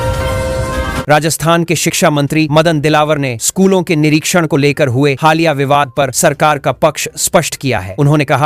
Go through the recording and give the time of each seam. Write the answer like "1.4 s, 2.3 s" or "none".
1.0 s